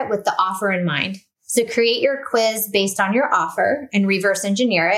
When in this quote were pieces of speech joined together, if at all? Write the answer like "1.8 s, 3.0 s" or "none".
none